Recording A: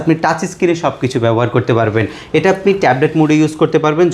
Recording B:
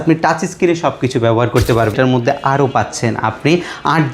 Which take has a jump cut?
B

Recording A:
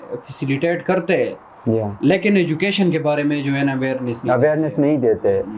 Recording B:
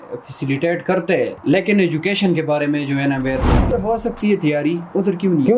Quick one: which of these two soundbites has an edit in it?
B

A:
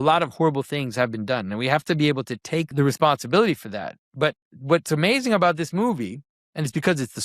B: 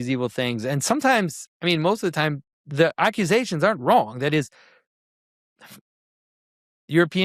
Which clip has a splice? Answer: A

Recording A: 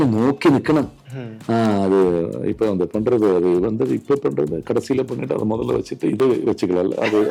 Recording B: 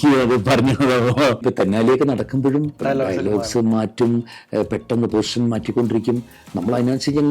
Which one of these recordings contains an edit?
B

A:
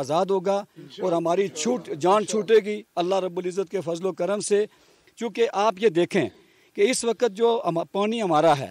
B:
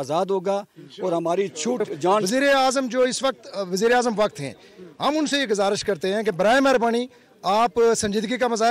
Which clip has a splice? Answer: B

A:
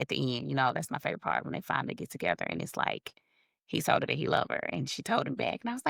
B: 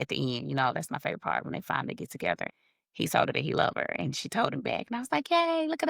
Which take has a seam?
B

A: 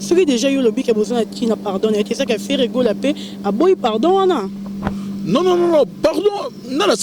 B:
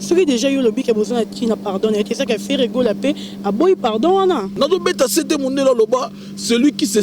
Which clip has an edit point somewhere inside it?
B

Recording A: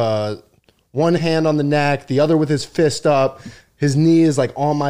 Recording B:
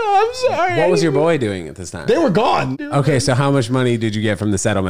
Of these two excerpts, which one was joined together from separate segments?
B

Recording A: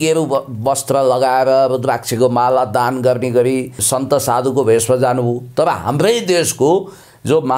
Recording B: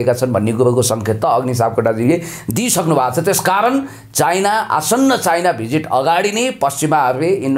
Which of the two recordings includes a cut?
A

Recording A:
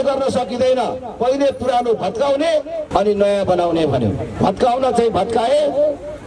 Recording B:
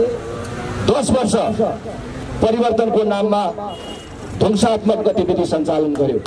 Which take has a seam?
A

